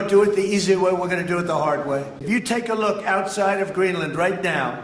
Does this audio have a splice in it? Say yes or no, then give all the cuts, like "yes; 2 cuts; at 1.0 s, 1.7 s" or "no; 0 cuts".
yes; 1 cut; at 2.2 s